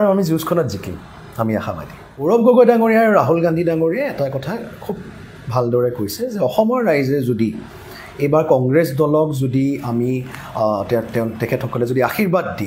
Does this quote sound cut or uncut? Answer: cut